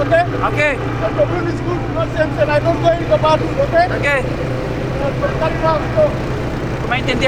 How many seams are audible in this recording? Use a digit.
0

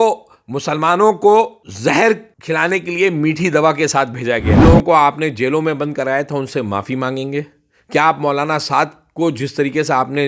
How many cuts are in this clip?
3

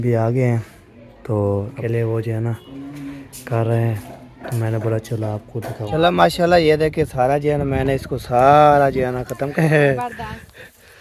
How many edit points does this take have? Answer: 3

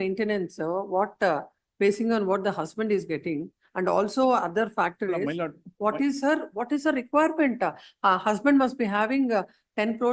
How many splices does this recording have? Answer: 0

